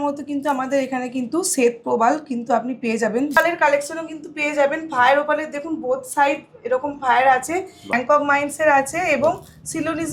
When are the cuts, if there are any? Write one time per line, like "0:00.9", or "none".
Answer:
0:03.4
0:07.9